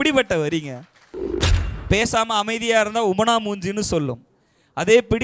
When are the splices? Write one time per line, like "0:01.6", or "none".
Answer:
0:01.3